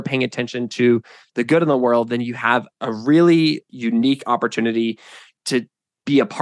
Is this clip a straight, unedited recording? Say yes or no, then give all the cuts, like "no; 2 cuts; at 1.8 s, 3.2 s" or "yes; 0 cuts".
no; 2 cuts; at 2.7 s, 3.7 s